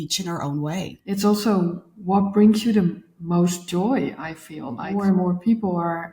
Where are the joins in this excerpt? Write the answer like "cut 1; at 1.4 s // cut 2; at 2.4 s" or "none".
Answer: cut 1; at 1.0 s // cut 2; at 4.9 s